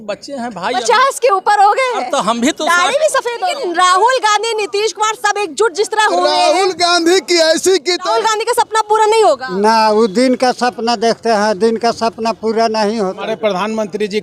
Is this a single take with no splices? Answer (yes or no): no